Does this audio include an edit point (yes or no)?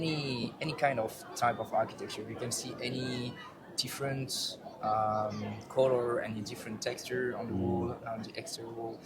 no